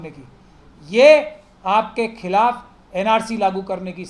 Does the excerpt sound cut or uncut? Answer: uncut